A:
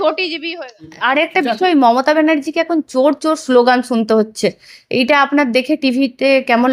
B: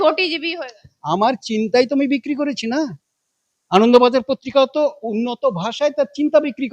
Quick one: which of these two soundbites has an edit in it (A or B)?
A